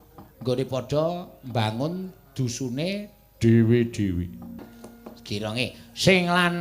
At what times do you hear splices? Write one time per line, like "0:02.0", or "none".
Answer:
0:04.6